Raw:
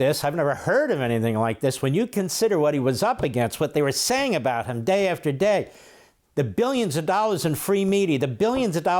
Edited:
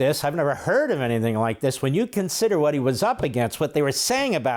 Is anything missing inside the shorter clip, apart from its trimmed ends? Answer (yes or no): no